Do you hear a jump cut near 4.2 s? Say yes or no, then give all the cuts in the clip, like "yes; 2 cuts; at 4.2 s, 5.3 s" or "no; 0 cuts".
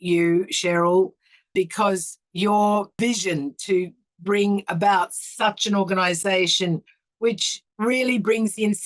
no; 3 cuts; at 1.5 s, 3.0 s, 7.5 s